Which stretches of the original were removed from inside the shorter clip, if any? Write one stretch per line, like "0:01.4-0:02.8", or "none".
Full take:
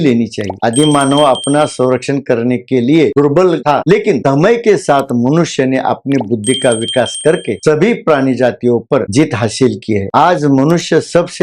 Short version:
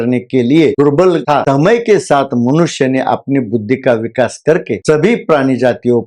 0:03.8-0:04.2